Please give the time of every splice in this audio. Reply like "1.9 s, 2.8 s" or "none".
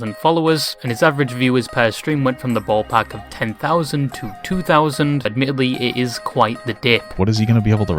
5.3 s, 7.1 s